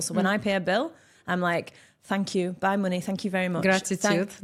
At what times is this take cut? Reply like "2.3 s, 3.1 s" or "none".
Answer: none